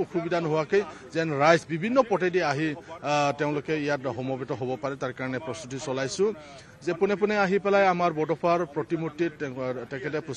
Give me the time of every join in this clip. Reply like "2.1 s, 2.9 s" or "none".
none